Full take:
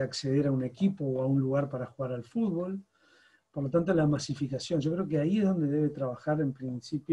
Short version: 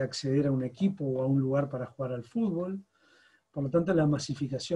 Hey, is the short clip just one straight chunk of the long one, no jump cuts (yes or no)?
yes